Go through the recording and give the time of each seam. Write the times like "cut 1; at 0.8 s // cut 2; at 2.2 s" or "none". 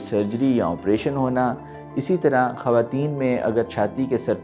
none